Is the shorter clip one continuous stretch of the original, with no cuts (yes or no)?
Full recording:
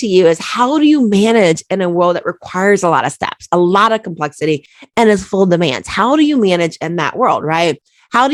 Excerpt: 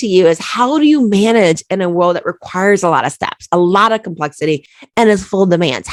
yes